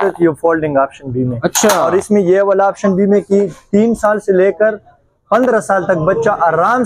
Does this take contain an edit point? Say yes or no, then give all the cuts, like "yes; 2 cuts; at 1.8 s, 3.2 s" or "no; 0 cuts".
no; 0 cuts